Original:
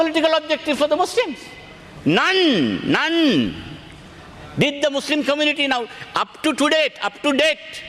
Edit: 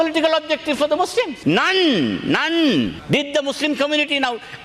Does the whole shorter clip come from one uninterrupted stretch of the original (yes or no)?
no